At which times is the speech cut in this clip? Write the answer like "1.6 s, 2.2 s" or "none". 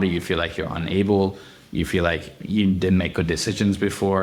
none